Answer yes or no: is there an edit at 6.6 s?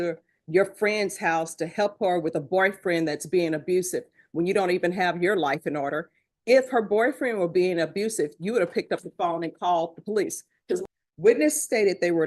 no